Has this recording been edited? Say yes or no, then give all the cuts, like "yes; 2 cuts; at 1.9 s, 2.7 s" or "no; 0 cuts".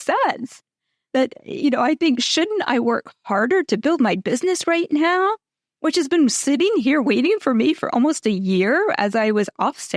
no; 0 cuts